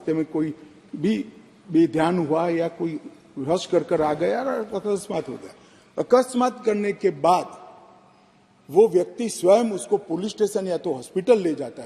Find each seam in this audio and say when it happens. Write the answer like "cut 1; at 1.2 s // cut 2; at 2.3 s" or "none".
none